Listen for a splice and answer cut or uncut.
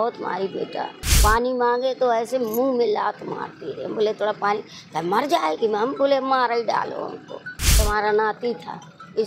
cut